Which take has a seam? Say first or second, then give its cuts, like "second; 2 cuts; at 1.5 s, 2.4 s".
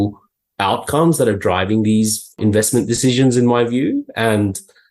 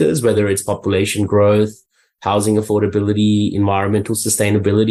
first; 1 cut; at 2.4 s